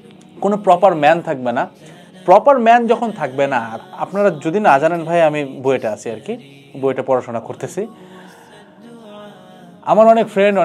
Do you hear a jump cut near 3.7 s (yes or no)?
yes